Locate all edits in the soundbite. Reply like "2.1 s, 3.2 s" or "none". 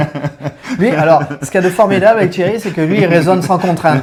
none